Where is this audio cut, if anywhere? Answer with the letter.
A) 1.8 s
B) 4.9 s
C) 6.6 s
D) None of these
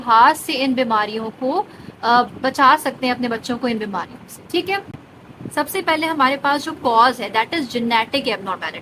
D